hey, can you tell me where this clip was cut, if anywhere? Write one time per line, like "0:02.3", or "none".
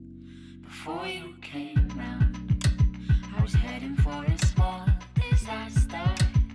0:01.0